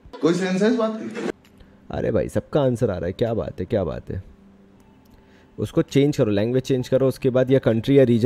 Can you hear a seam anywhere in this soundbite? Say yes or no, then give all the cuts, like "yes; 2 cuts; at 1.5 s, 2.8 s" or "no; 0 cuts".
no; 0 cuts